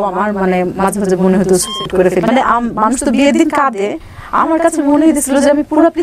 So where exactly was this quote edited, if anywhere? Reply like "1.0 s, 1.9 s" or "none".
2.2 s

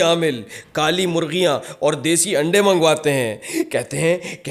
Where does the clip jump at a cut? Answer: none

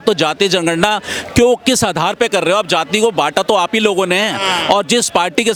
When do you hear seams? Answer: none

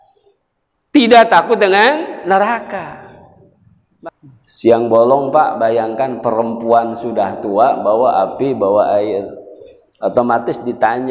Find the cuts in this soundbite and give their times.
3.8 s

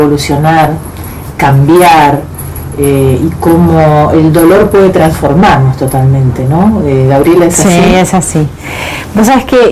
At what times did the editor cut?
1.7 s

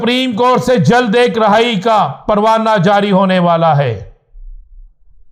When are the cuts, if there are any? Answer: none

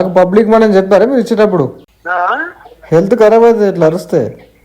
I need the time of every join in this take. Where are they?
1.8 s

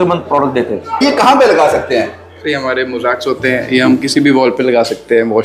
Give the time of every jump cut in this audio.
1.0 s

